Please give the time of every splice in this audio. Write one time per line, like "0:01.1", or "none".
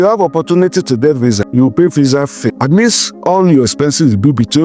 0:01.4
0:02.5